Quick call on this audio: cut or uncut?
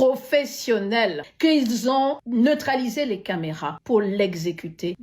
cut